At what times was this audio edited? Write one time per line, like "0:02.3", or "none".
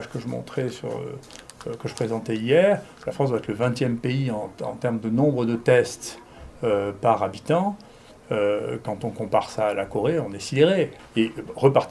0:11.0